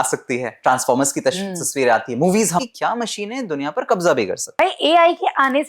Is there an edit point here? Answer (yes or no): yes